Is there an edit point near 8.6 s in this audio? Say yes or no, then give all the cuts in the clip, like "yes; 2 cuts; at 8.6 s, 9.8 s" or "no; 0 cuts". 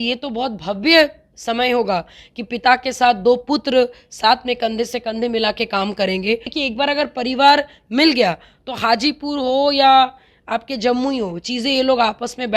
no; 1 cut; at 6.5 s